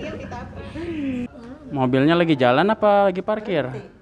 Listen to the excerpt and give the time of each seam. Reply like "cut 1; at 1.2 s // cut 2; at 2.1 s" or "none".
cut 1; at 1.3 s